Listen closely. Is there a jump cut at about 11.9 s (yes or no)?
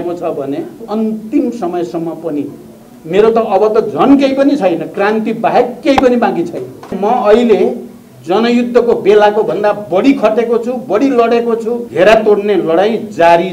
yes